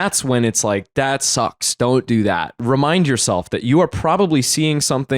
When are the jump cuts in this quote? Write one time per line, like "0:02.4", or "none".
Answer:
0:02.5

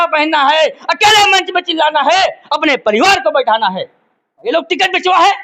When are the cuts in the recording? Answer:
0:04.4

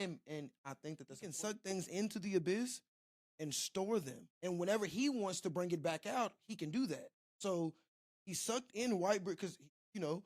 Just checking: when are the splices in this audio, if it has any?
0:01.3
0:04.2

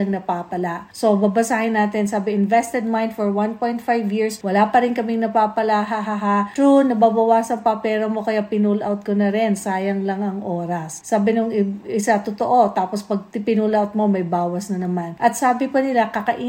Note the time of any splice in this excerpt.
none

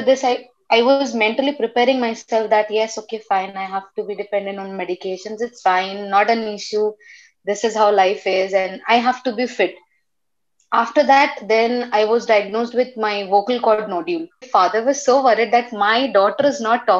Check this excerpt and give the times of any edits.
0:14.5

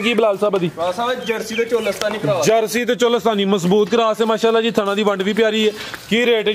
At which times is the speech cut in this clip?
none

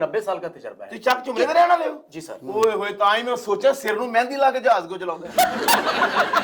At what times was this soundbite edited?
none

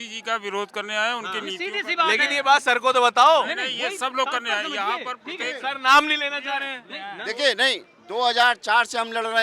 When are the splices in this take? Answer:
none

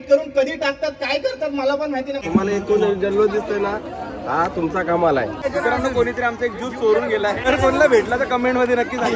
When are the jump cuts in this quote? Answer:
0:02.2
0:05.4
0:07.5

